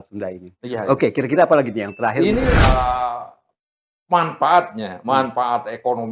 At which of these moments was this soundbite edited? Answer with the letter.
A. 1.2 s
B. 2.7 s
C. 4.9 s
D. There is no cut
B